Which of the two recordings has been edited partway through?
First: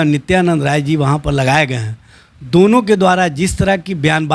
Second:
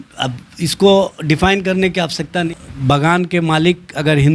second; 1 cut; at 2.5 s

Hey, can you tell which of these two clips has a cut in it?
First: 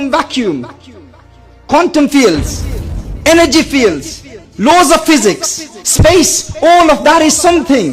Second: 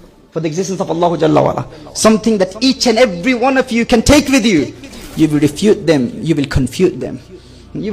second; 1 cut; at 4.9 s

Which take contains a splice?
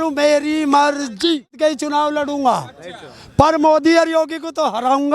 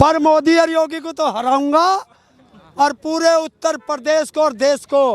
first; 1 cut; at 1.6 s

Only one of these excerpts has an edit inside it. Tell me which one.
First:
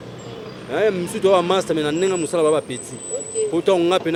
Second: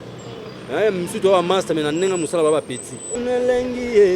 second; 1 cut; at 3.1 s

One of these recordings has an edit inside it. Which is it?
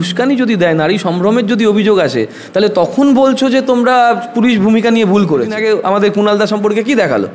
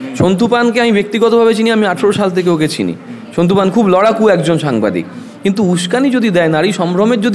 first; 1 cut; at 5.6 s

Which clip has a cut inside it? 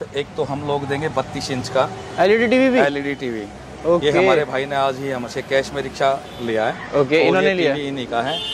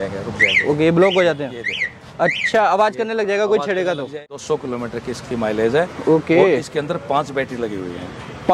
second; 1 cut; at 4.3 s

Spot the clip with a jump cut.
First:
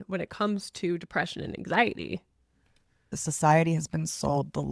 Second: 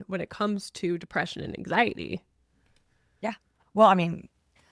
first; 1 cut; at 3.1 s

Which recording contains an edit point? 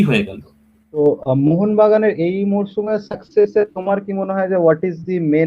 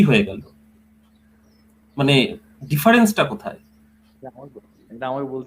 first; 1 cut; at 1.0 s

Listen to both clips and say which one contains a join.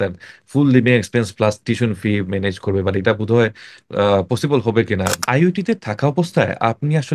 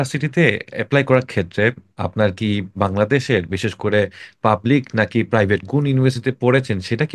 first; 1 cut; at 5.2 s

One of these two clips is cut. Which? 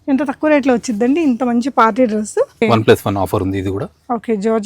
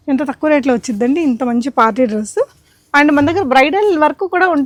first; 1 cut; at 2.6 s

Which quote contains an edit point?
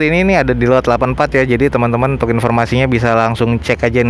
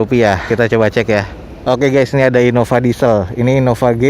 second; 1 cut; at 1.3 s

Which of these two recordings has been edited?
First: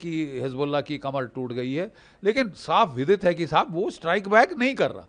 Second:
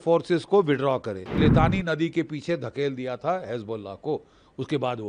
second; 1 cut; at 1.4 s

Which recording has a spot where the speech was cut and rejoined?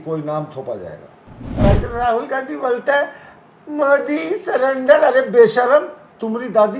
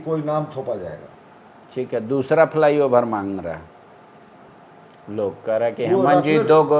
first; 1 cut; at 1.4 s

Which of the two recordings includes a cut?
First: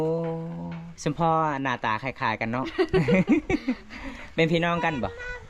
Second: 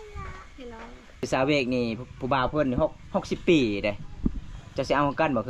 second; 1 cut; at 1.2 s

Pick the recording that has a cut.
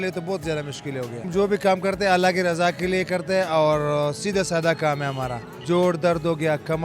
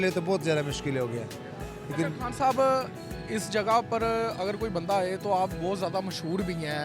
first; 2 cuts; at 1.3 s, 5.5 s

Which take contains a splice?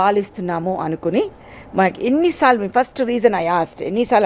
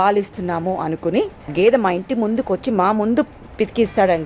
second; 1 cut; at 1.5 s

